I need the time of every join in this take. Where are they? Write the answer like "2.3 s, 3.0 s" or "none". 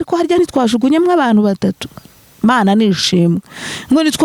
none